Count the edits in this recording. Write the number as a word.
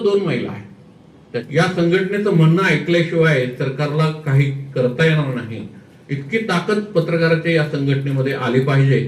one